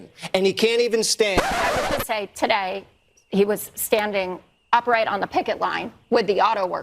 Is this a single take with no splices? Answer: no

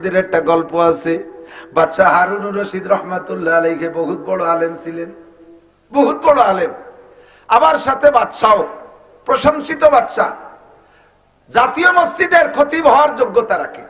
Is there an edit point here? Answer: no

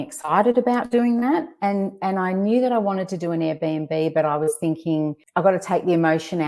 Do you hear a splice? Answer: no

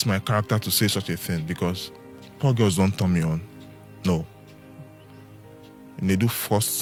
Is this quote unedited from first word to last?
yes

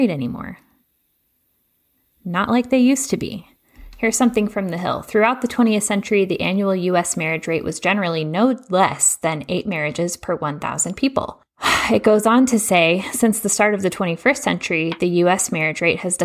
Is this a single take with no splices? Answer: no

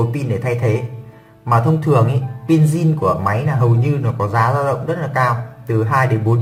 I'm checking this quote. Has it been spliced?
no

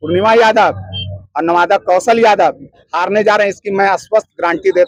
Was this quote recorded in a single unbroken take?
yes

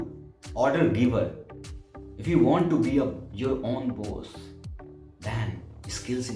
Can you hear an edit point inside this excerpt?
no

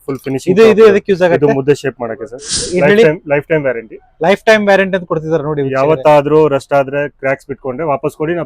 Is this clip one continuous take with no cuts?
no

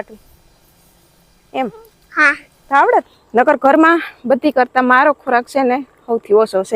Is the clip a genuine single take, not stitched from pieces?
no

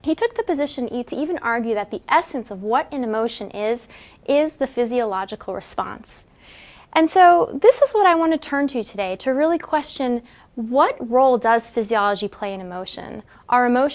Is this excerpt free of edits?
yes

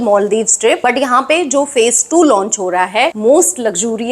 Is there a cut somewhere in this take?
yes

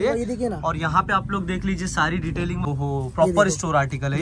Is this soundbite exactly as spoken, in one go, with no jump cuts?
no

